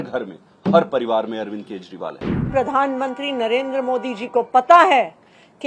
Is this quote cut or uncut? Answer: cut